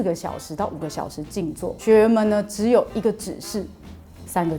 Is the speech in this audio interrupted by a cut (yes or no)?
yes